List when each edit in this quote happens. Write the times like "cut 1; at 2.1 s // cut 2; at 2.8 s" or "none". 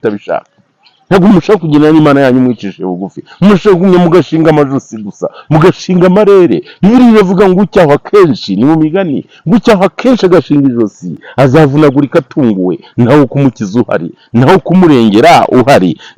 none